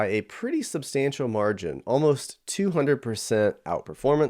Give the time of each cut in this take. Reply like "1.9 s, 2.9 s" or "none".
none